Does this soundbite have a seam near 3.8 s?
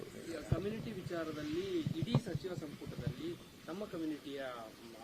no; 1 cut; at 2.5 s

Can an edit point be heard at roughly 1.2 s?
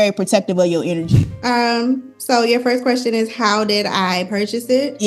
yes; 1 cut; at 1.2 s

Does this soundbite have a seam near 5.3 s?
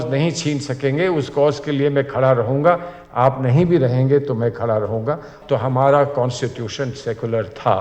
yes; 1 cut; at 5.3 s

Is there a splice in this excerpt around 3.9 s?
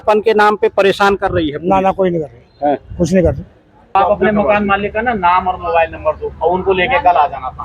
yes; 1 cut; at 3.9 s

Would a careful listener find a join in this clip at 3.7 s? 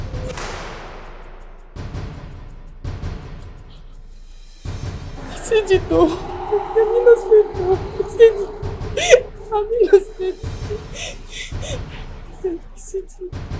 no; 1 cut; at 1.1 s

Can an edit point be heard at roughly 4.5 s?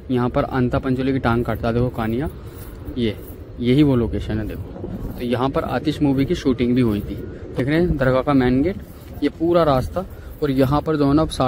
no; 1 cut; at 7.6 s

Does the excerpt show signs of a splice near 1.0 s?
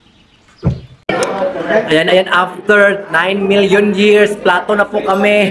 yes; 1 cut; at 1.0 s

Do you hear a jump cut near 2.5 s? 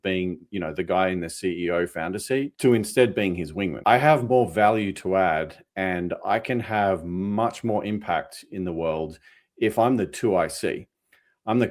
yes; 2 cuts; at 2.5 s, 3.7 s

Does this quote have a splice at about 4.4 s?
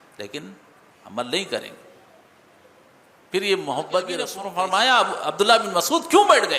yes; 1 cut; at 4.4 s

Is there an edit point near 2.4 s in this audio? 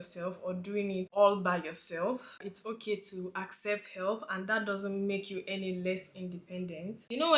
no; 0 cuts

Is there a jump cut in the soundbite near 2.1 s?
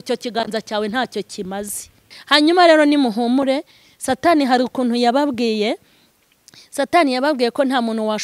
yes; 1 cut; at 2.1 s

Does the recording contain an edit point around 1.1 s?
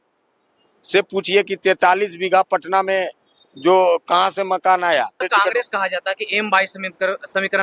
no; 1 cut; at 5.2 s

